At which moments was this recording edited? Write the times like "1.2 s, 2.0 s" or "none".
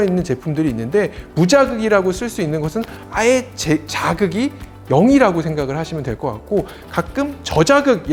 none